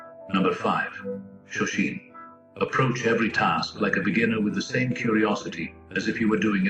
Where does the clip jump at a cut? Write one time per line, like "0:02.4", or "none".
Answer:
0:00.9